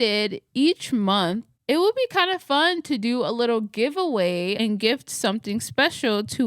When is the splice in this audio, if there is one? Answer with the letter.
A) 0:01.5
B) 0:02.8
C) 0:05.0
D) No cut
A